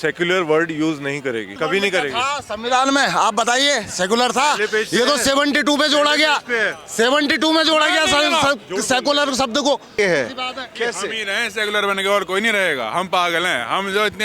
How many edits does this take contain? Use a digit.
2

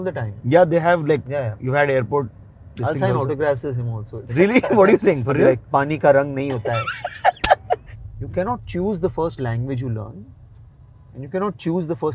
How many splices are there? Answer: 1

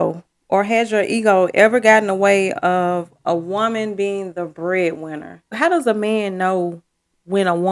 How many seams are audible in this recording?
1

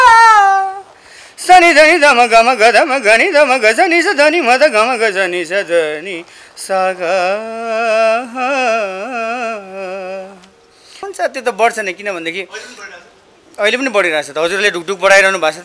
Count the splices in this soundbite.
1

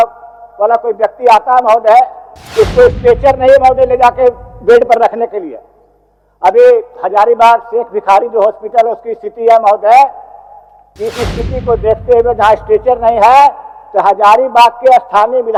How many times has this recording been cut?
0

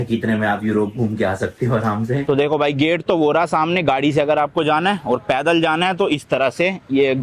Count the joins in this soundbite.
1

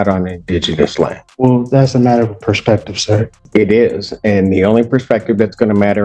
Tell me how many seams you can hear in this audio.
2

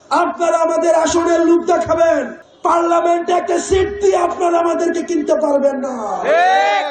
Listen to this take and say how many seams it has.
1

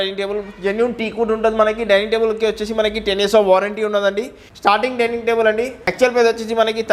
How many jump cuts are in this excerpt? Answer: 2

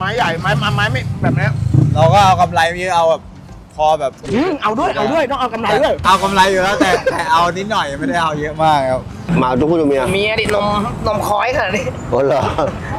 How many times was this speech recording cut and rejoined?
1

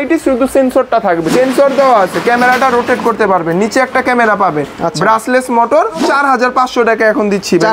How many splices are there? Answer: 2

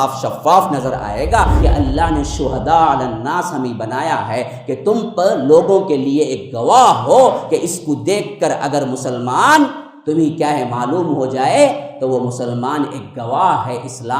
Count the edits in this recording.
1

